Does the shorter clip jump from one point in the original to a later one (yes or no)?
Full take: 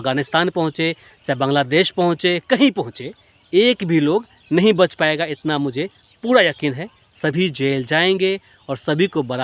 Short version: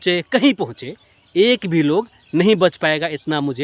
no